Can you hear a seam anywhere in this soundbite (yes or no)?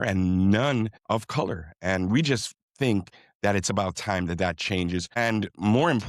yes